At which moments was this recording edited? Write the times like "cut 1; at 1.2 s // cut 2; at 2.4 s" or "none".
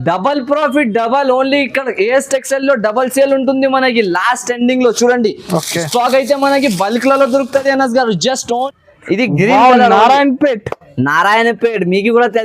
cut 1; at 8.6 s